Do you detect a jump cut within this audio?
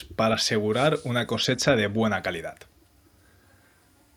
no; 0 cuts

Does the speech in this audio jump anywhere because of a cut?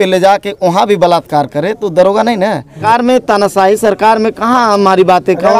yes; 1 cut; at 2.8 s

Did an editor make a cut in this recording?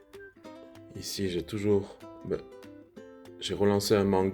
yes; 1 cut; at 0.9 s

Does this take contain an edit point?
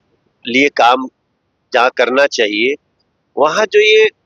no; 0 cuts

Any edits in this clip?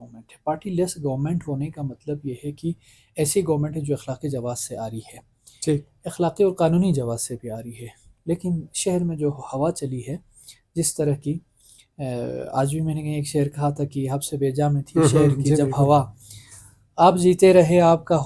no; 0 cuts

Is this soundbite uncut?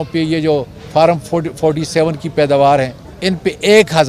no; 1 cut; at 3.0 s

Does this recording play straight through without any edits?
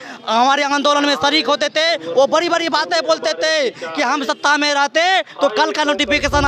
yes; 0 cuts

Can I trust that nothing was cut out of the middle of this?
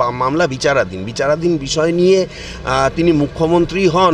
yes; 0 cuts

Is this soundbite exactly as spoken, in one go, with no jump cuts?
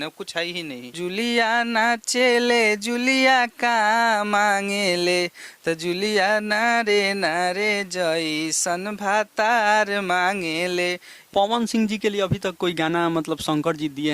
no; 2 cuts; at 0.9 s, 11.1 s

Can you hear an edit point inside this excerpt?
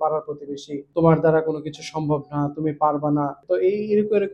yes; 2 cuts; at 0.9 s, 3.4 s

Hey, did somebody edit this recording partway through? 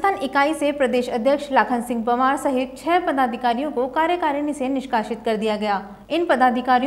yes; 1 cut; at 5.9 s

